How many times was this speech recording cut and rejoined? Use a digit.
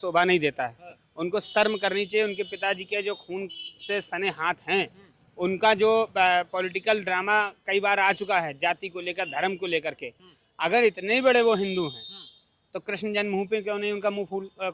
0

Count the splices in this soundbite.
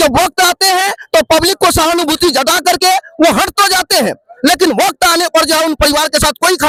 0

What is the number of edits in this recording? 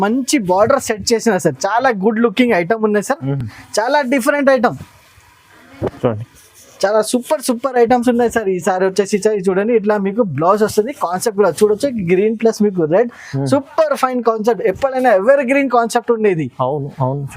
0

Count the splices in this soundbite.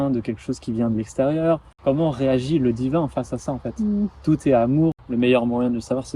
2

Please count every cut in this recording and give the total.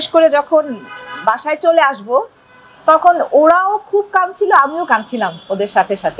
0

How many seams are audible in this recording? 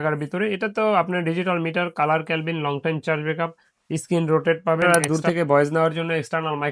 1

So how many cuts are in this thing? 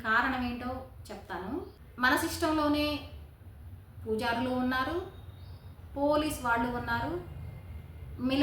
1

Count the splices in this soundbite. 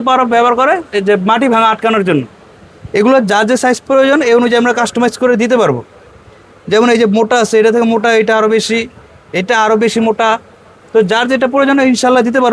0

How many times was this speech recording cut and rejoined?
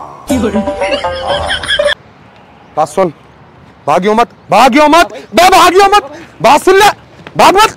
1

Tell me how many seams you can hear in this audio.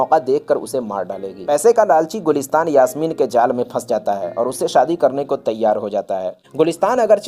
2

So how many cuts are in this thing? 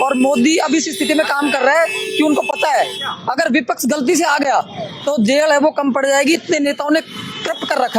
0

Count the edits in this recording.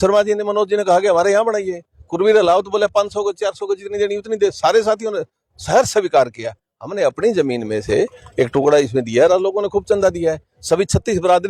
0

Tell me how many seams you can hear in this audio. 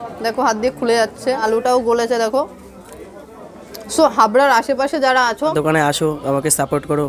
2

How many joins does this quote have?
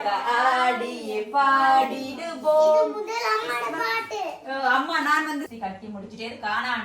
1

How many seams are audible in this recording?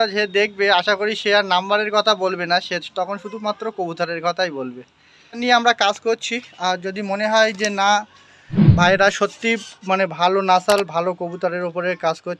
1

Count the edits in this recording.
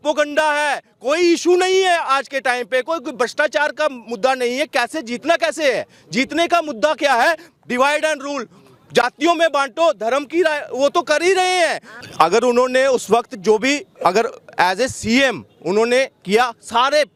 0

